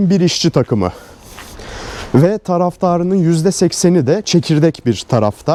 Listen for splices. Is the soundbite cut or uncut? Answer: uncut